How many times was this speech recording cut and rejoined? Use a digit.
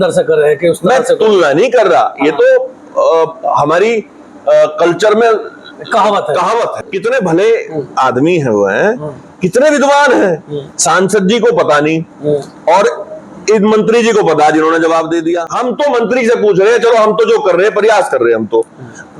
2